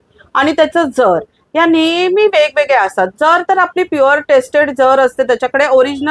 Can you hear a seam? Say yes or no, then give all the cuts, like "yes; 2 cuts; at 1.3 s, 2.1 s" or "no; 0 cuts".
no; 0 cuts